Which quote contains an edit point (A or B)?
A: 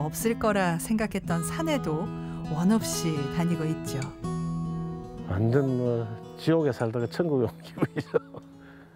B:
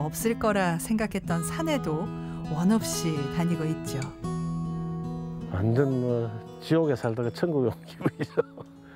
A